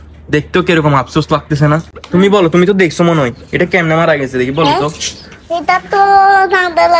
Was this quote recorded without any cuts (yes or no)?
no